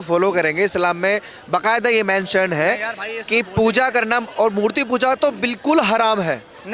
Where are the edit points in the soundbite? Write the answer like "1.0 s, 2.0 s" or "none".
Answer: none

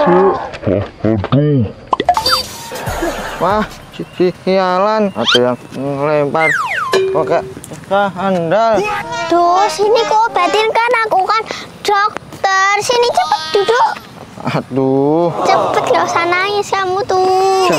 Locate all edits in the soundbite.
none

